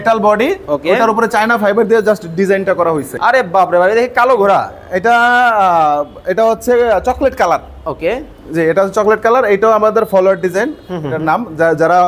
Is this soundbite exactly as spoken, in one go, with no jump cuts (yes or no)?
no